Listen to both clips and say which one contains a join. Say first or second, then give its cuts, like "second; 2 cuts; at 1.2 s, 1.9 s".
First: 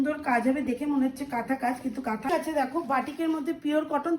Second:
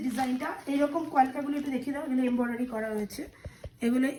first; 1 cut; at 2.3 s